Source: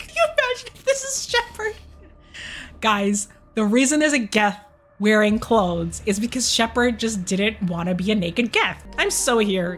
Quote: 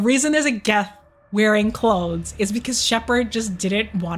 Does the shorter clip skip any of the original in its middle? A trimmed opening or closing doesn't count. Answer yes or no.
no